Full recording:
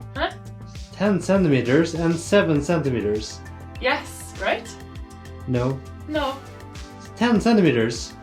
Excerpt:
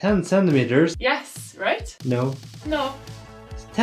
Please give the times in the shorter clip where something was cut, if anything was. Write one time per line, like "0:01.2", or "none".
0:01.0
0:01.9

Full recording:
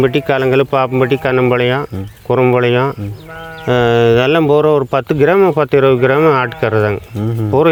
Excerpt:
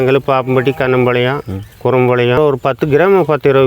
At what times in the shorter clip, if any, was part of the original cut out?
0:02.4

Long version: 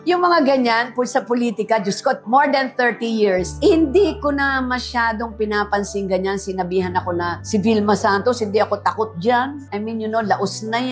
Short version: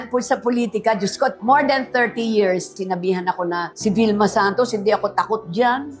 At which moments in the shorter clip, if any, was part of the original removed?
0:02.7

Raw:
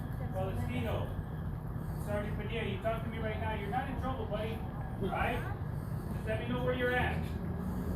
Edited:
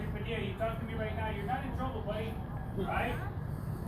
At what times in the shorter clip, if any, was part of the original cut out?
none

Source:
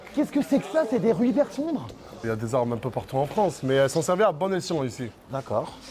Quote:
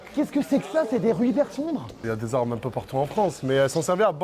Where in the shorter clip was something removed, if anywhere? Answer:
0:01.9

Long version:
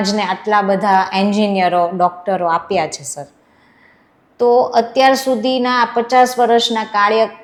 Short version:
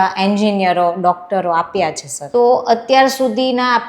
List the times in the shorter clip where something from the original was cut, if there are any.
0:02.1

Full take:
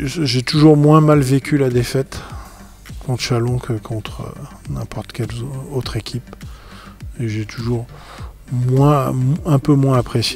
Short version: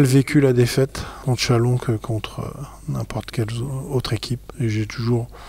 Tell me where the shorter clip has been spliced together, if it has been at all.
0:01.1
0:04.1

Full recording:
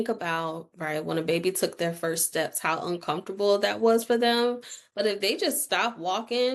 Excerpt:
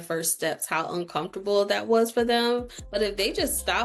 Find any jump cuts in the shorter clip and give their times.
0:02.8

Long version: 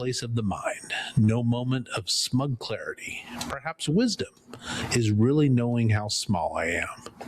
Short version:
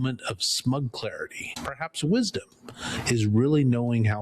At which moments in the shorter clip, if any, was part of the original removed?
0:01.5

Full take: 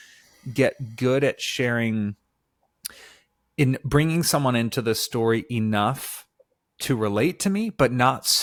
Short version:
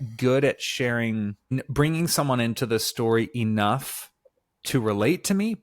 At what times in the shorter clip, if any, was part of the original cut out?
0:01.5

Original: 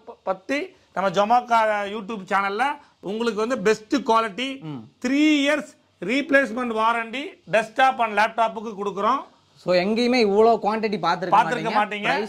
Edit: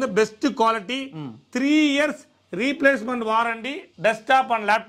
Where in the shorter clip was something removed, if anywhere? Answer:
none

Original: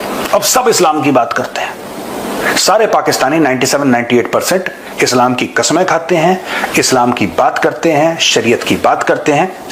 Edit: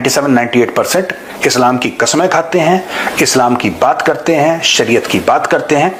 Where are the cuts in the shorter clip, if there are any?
none

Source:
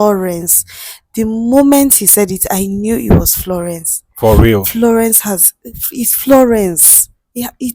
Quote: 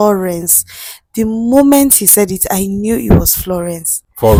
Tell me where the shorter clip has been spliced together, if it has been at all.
none

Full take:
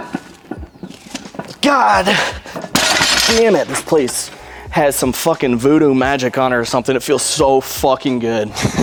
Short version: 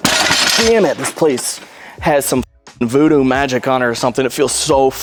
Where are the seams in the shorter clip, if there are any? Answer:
none

